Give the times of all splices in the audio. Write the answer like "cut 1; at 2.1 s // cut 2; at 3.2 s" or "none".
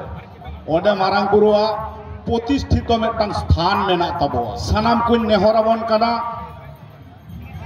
cut 1; at 4.6 s